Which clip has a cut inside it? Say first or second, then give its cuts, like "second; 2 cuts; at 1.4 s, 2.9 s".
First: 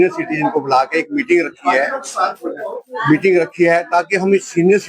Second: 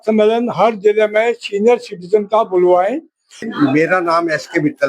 second; 1 cut; at 3.4 s